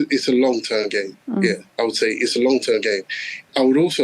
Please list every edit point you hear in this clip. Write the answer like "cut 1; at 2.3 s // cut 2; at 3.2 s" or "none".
none

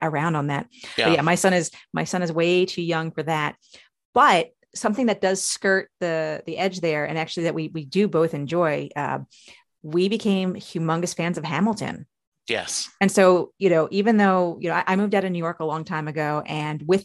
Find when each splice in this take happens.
none

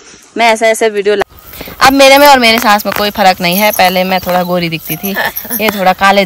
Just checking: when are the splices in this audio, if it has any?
cut 1; at 1.2 s

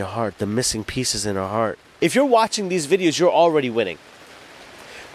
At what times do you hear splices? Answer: cut 1; at 1.9 s

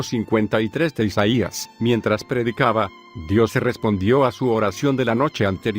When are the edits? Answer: cut 1; at 1.9 s

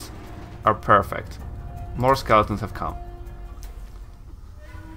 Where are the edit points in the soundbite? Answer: none

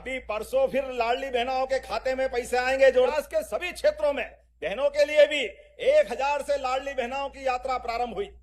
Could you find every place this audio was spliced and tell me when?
cut 1; at 3.1 s

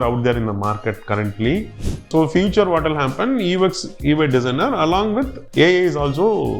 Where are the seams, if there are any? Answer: cut 1; at 1.8 s // cut 2; at 5.4 s

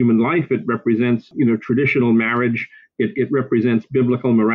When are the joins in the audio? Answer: cut 1; at 1.3 s

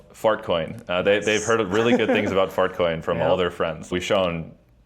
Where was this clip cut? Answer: cut 1; at 3.9 s

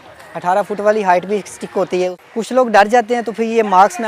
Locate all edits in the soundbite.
cut 1; at 2.2 s

